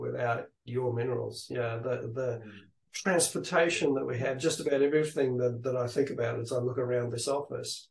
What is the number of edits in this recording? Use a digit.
0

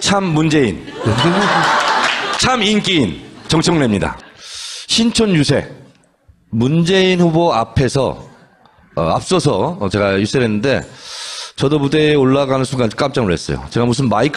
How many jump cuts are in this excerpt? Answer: 0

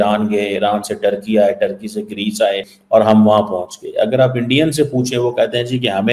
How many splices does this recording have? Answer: 1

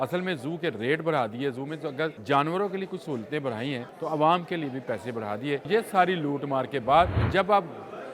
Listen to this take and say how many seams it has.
4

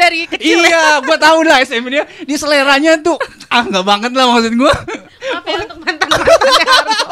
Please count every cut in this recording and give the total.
0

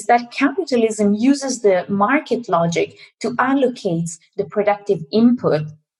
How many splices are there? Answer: 0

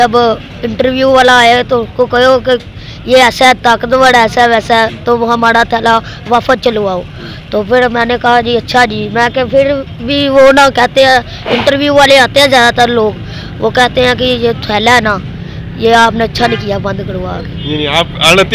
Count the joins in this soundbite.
0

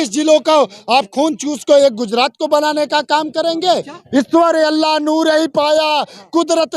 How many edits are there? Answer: 1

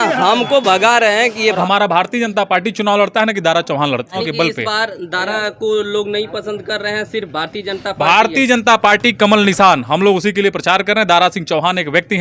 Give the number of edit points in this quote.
2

